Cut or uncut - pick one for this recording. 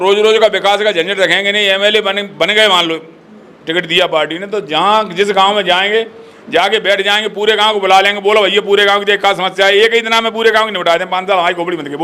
uncut